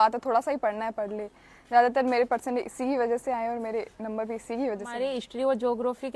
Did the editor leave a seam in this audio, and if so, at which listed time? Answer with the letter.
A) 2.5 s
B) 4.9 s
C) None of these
B